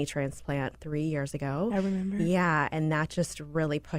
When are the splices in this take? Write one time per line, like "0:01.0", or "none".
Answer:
none